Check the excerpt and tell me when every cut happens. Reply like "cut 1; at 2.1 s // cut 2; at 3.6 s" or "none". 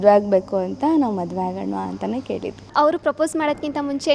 cut 1; at 2.7 s